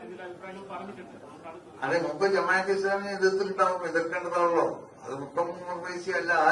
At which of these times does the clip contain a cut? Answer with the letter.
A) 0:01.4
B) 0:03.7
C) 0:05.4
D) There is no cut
D